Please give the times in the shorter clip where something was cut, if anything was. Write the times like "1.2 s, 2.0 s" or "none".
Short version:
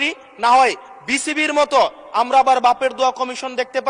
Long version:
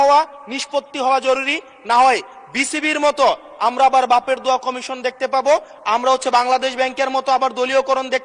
none